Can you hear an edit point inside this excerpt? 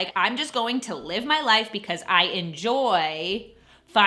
no; 0 cuts

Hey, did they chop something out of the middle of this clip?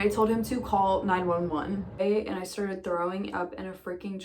yes; 1 cut; at 2.0 s

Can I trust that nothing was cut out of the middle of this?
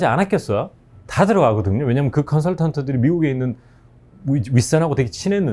yes; 0 cuts

